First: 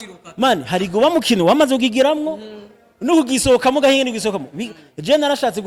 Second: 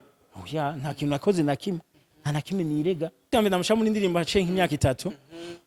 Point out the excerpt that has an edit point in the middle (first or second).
second